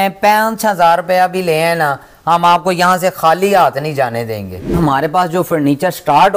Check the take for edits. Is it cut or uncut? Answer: cut